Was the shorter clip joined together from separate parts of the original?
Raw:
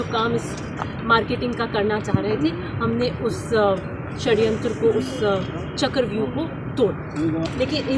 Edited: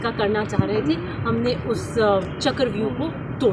yes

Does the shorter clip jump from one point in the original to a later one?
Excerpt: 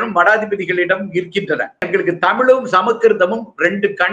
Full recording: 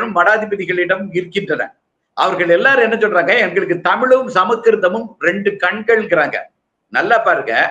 yes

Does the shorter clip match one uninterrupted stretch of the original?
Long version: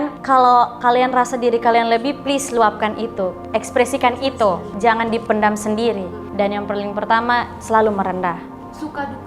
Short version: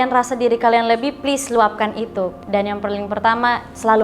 no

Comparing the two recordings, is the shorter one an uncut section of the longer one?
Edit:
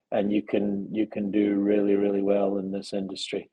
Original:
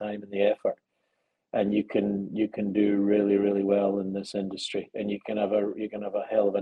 yes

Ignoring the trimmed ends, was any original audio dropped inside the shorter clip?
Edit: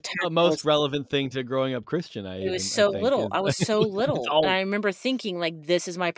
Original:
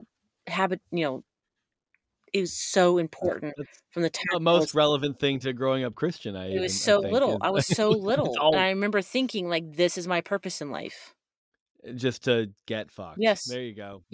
no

